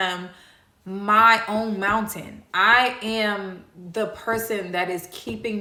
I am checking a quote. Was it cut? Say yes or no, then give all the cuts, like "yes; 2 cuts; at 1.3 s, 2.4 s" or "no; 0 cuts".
no; 0 cuts